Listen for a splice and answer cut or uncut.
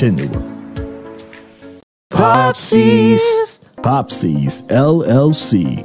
cut